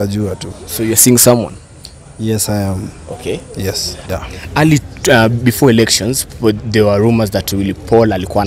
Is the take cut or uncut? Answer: cut